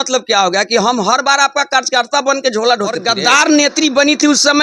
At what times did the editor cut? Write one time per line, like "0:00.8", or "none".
0:03.1